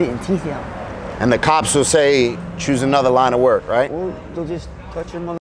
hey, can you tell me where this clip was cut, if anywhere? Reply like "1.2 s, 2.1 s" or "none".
1.1 s